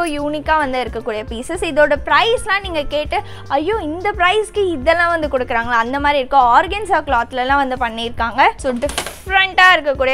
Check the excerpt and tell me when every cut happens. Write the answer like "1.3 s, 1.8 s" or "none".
8.6 s